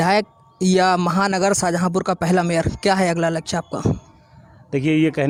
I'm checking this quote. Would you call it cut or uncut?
uncut